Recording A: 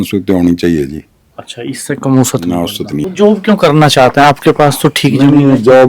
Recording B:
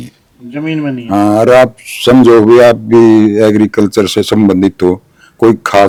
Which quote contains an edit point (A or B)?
A